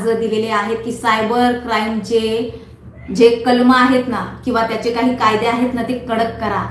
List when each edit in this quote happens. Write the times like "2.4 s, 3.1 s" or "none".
none